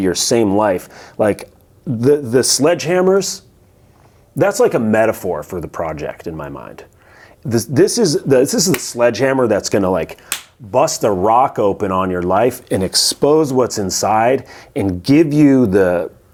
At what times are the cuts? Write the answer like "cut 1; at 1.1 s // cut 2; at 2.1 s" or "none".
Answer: none